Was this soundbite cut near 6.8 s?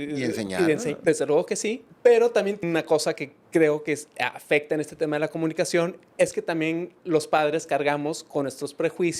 no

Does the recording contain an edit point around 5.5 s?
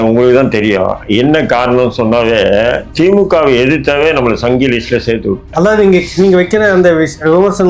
yes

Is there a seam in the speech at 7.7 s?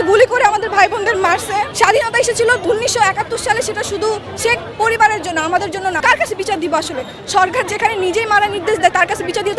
no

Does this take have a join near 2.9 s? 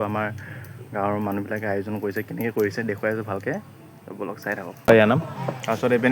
no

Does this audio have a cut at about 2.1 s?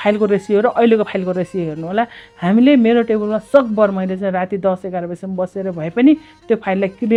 no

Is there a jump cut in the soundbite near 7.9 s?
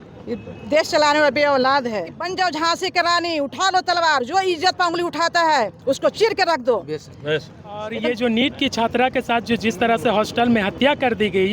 yes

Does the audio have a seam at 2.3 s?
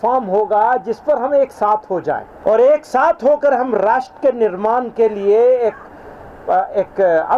yes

